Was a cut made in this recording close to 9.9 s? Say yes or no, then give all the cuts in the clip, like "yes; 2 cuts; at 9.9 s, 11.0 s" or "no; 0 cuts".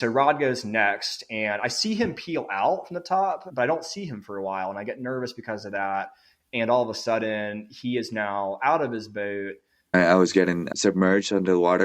yes; 1 cut; at 9.9 s